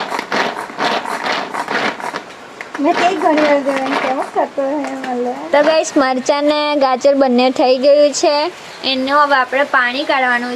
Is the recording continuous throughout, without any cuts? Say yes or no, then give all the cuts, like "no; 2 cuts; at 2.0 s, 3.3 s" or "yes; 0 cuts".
no; 1 cut; at 5.4 s